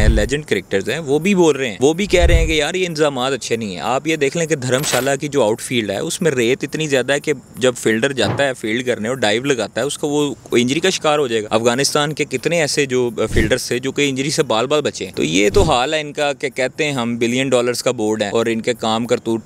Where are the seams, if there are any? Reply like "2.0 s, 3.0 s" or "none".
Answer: 1.7 s, 11.5 s, 15.0 s, 18.3 s